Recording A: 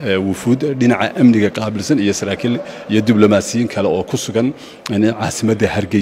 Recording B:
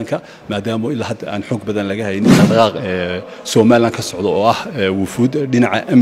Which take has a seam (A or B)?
B